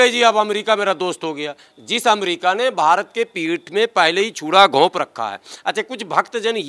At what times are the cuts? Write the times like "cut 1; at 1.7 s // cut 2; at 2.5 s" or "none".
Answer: none